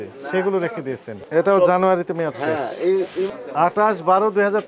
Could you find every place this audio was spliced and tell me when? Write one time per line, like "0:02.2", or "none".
0:01.1